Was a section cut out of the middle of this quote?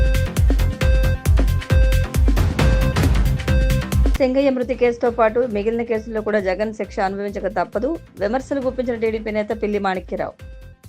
yes; 1 cut; at 1.2 s

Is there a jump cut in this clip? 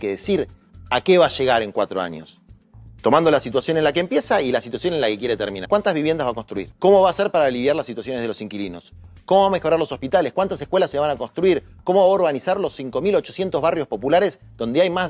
yes; 2 cuts; at 5.6 s, 6.6 s

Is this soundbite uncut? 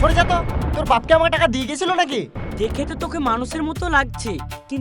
no; 1 cut; at 2.4 s

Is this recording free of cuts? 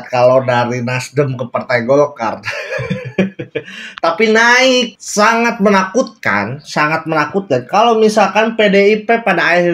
no; 1 cut; at 5.0 s

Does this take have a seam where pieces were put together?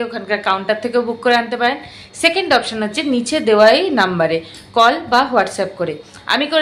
no; 0 cuts

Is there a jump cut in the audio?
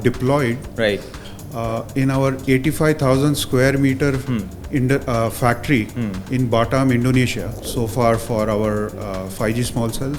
yes; 1 cut; at 7.5 s

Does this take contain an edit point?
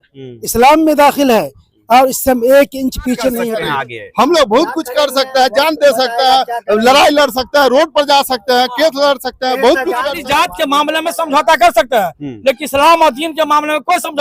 yes; 2 cuts; at 3.4 s, 10.1 s

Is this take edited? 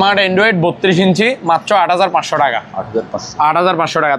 no; 0 cuts

